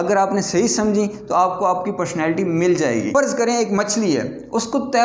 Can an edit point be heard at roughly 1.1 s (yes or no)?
no